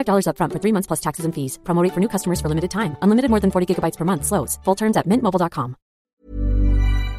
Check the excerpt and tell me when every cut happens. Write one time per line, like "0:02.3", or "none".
0:06.2